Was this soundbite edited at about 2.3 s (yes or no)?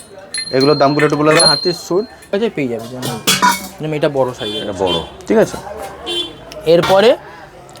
yes